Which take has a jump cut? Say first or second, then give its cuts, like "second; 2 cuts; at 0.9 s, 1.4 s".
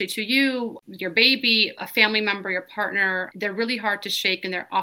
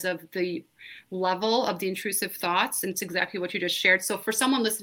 first; 3 cuts; at 0.8 s, 1.8 s, 3.3 s